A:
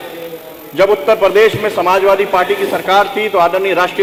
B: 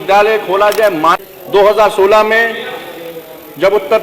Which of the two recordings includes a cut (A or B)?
B